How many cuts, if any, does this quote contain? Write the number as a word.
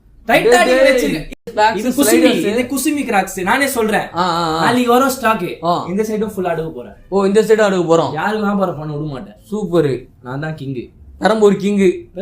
one